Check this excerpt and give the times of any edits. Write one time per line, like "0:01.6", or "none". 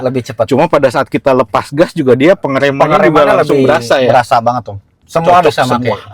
0:05.0